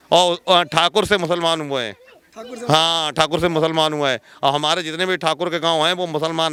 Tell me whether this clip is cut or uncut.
uncut